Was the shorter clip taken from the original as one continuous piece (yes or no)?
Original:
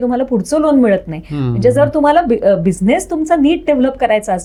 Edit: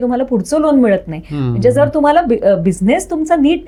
yes